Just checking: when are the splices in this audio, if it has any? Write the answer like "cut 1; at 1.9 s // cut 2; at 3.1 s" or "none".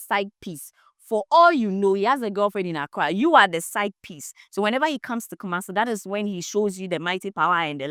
none

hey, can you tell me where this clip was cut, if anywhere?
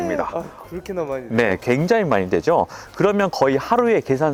none

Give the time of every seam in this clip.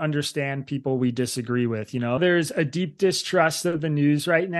cut 1; at 2.2 s

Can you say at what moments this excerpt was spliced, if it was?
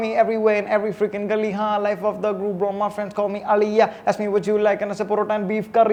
none

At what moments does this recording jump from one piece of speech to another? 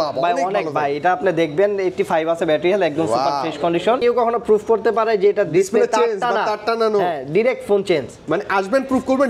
cut 1; at 4.0 s

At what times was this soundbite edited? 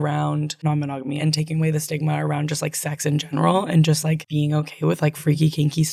none

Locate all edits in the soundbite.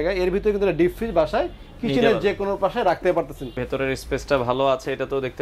cut 1; at 3.6 s

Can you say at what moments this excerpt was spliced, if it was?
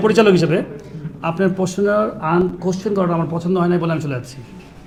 none

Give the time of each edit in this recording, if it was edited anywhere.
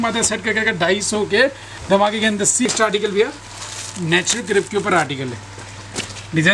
cut 1; at 2.7 s

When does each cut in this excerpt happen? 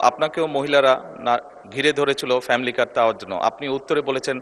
none

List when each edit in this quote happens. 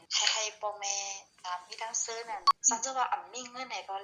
cut 1; at 2.5 s

